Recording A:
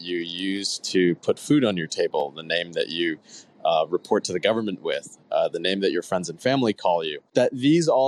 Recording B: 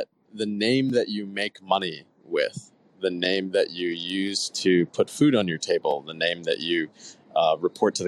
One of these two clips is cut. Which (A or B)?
A